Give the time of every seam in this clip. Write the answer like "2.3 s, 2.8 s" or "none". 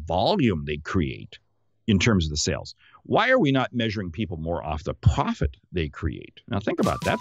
none